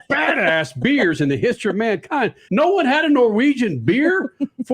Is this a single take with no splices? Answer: no; 1 cut; at 2.4 s

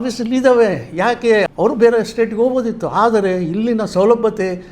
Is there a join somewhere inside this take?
yes; 1 cut; at 1.5 s

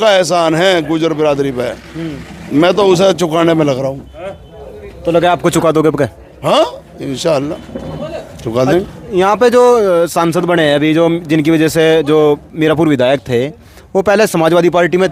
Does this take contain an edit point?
no; 0 cuts

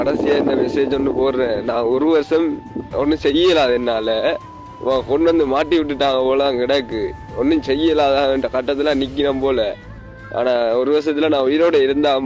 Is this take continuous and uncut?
yes; 0 cuts

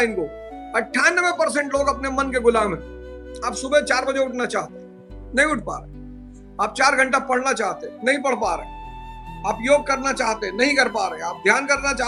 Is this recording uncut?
yes; 0 cuts

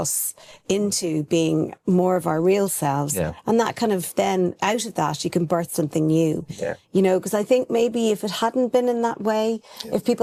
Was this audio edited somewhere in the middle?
no; 0 cuts

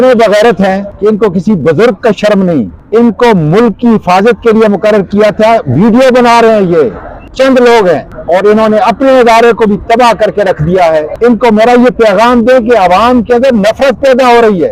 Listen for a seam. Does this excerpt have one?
yes; 5 cuts; at 0.9 s, 2.8 s, 7.3 s, 8.1 s, 11.1 s

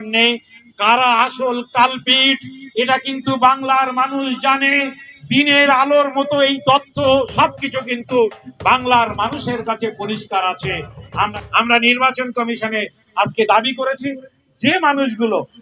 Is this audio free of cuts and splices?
no; 1 cut; at 11.3 s

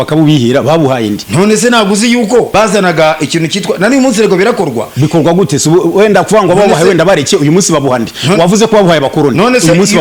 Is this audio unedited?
no; 2 cuts; at 1.2 s, 2.5 s

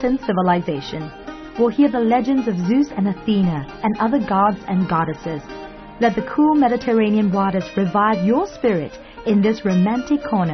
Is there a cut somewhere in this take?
no; 0 cuts

